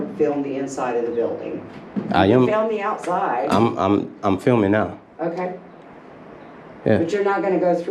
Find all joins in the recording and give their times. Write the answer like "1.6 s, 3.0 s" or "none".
none